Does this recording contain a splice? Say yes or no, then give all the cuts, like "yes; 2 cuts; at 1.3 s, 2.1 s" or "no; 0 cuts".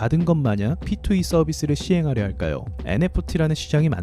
yes; 1 cut; at 2.8 s